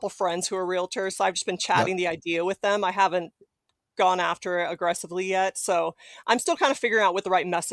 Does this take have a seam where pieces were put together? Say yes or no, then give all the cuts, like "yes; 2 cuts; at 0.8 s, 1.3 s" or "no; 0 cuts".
no; 0 cuts